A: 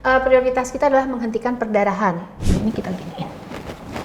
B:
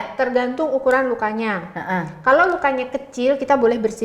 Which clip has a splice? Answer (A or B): A